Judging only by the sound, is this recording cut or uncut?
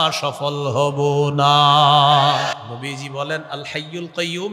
cut